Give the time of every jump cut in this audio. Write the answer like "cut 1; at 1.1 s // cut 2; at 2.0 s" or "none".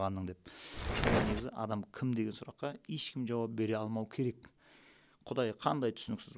cut 1; at 1.0 s